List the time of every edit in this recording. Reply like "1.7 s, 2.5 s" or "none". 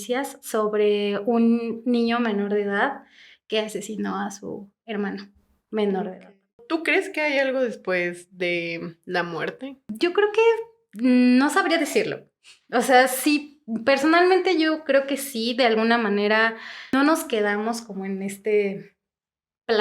6.6 s, 9.9 s, 16.9 s